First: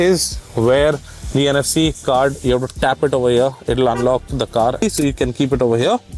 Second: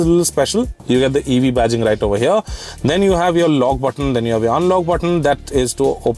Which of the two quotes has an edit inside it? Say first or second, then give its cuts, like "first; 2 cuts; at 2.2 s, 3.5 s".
first; 1 cut; at 4.8 s